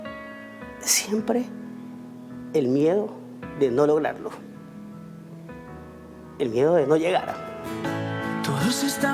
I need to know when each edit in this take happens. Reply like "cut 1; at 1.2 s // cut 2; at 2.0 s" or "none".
cut 1; at 7.5 s